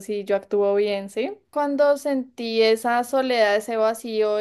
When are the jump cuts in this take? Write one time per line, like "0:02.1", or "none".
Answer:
0:01.5